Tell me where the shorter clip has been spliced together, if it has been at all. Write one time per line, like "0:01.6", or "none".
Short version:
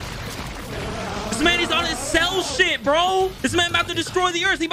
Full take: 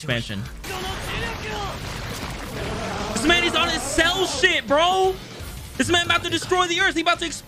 0:03.3